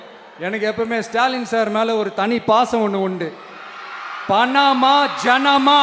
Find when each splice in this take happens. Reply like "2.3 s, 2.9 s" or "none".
4.1 s